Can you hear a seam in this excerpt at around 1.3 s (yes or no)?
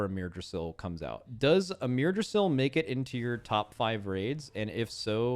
yes